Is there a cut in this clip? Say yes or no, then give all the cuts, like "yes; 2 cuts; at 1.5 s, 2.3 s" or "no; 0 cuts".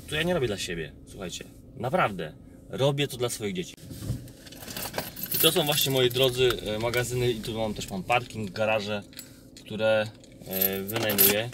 yes; 1 cut; at 3.7 s